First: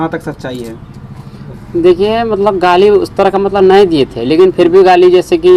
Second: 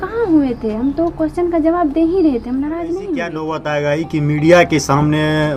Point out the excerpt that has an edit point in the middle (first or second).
second